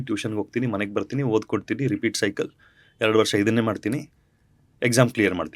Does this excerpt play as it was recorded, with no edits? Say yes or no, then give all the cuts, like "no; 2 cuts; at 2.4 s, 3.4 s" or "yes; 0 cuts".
yes; 0 cuts